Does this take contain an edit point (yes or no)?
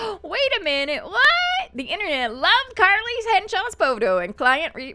no